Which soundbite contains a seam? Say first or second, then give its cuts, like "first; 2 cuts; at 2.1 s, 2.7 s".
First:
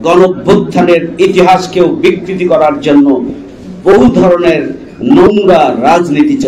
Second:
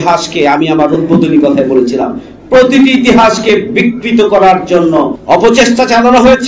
second; 1 cut; at 5.2 s